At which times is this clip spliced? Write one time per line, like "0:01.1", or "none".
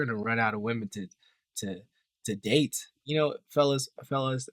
0:02.9